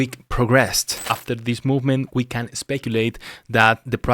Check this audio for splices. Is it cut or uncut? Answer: cut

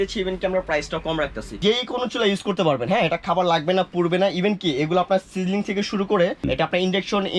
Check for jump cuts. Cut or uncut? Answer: cut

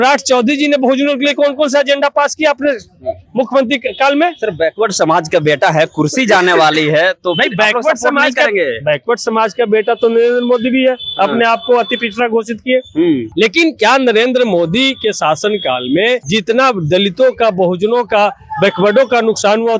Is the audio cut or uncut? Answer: cut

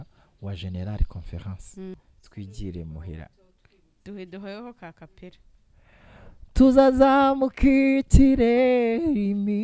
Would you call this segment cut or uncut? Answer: cut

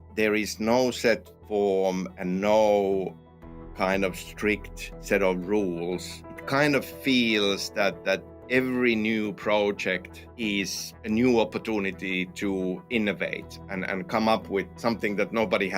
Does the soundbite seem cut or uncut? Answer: cut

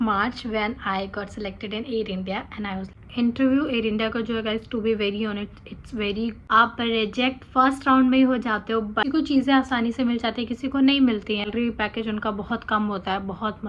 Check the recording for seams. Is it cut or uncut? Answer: cut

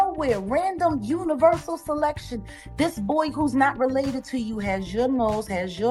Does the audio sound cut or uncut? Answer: uncut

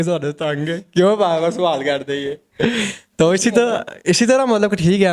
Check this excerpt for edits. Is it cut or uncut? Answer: uncut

